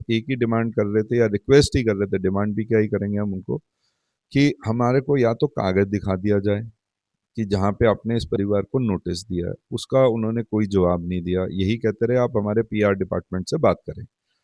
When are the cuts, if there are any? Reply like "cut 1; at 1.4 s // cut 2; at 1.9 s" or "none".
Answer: none